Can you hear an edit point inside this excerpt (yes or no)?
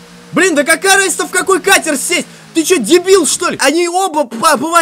yes